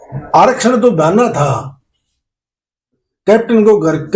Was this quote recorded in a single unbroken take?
yes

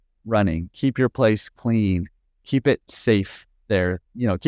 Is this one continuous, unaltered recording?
yes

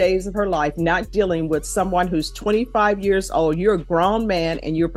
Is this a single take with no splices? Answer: yes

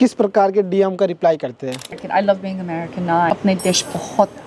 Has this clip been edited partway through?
yes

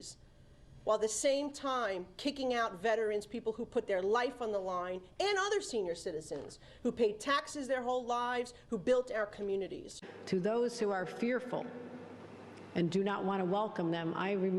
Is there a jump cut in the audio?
yes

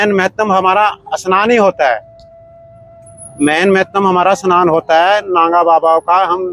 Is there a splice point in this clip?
no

